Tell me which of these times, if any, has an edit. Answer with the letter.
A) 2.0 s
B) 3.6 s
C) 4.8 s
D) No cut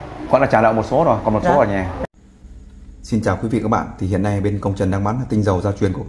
A